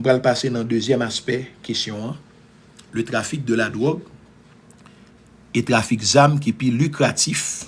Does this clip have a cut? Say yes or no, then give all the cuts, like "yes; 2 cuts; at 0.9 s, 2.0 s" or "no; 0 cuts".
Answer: no; 0 cuts